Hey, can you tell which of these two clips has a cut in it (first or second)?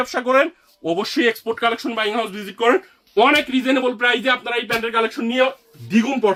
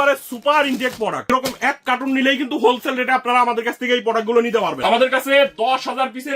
second